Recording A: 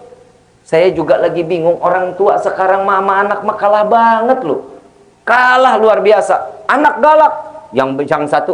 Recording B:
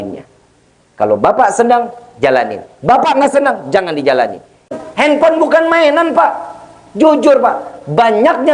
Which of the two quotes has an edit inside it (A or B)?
B